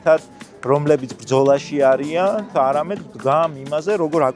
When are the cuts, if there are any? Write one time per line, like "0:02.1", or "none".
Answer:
0:02.5